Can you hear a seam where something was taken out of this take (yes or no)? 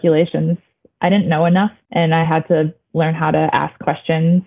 yes